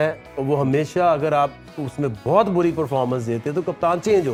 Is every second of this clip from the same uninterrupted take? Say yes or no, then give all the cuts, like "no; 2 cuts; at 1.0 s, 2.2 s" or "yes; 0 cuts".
yes; 0 cuts